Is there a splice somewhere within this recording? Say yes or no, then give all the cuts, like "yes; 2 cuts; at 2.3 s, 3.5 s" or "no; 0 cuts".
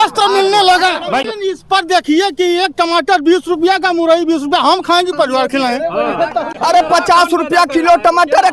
yes; 2 cuts; at 1.2 s, 6.5 s